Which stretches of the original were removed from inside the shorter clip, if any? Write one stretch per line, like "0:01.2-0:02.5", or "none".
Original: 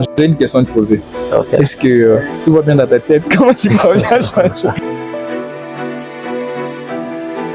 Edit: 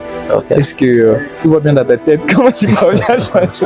none